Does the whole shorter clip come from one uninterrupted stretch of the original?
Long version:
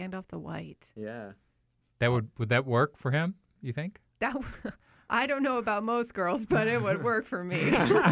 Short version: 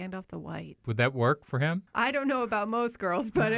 no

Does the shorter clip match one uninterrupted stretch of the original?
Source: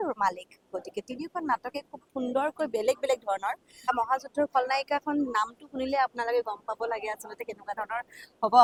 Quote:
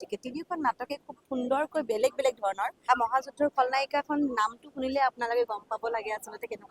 no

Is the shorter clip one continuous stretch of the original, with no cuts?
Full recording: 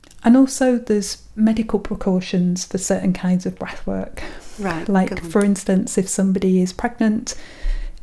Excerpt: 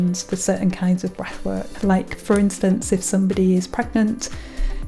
no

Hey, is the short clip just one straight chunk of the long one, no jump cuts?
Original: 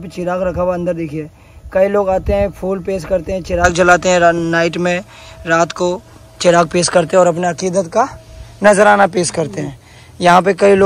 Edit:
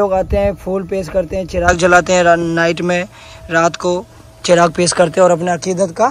yes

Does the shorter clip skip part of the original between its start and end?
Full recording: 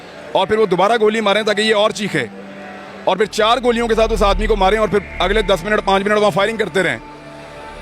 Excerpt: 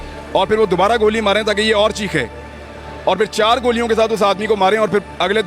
no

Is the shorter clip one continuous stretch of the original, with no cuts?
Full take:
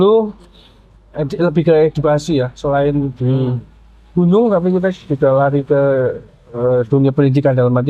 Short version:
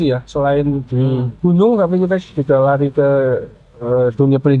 no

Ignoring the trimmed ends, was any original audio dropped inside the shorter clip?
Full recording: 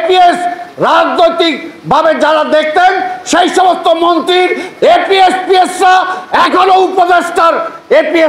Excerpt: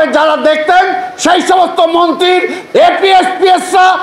no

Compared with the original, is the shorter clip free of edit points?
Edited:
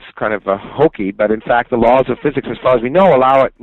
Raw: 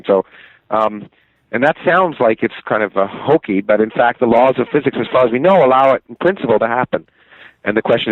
yes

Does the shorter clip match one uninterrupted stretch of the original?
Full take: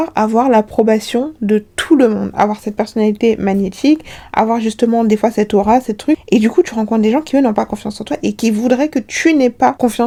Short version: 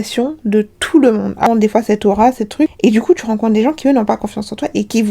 no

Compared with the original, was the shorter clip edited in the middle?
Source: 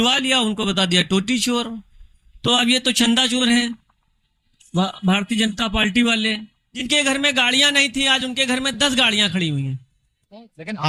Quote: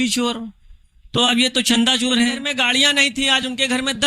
yes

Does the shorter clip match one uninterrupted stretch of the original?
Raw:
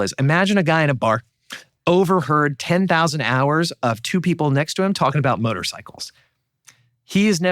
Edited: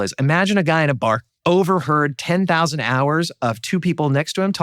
no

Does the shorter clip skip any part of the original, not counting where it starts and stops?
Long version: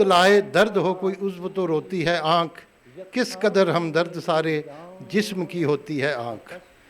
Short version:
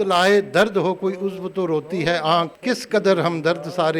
yes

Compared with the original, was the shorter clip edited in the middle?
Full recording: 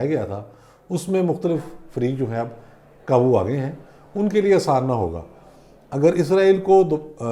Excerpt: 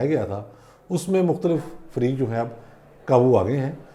no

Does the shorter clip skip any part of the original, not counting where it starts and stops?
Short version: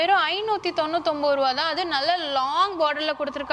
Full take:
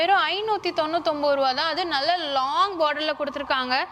no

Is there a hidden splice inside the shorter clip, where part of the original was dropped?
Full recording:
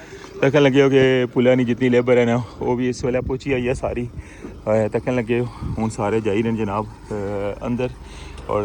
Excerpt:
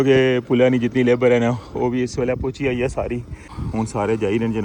yes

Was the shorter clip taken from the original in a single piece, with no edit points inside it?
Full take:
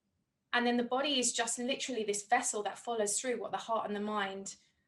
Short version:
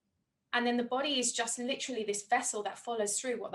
yes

